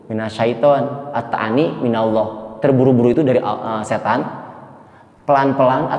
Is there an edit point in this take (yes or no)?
no